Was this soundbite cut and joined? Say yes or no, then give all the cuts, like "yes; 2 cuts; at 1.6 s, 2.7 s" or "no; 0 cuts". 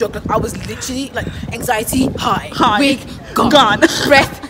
no; 0 cuts